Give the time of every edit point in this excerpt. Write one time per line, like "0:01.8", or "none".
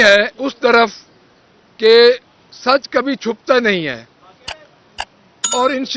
none